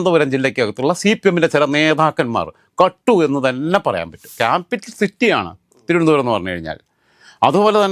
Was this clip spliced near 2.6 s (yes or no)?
no